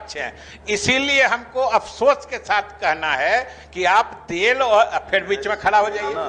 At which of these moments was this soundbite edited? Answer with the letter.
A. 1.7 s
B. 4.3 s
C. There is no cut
C